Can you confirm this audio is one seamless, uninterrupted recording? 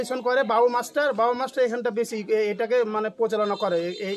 yes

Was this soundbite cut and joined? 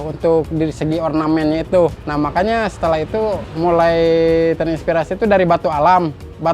yes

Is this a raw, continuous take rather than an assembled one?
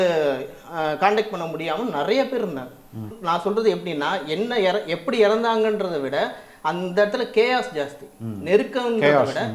no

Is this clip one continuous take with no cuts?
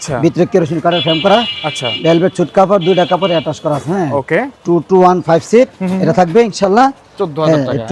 yes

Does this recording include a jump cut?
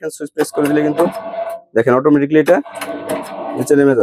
no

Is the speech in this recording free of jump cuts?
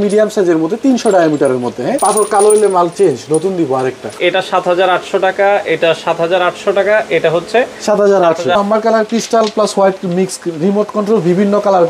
no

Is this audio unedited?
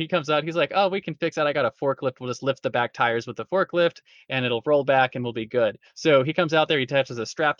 yes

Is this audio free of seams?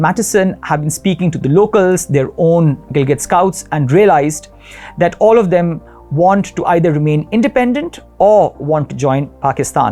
yes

